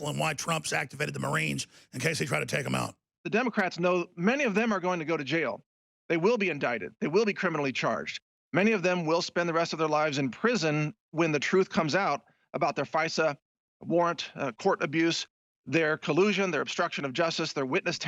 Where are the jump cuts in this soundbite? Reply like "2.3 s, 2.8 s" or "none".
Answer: 3.1 s

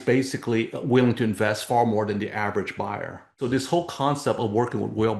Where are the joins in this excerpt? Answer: 3.3 s

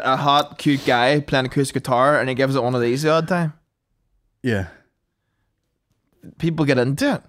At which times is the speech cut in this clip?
none

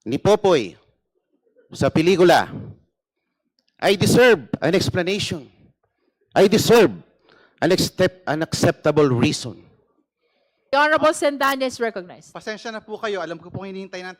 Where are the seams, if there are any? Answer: 10.7 s

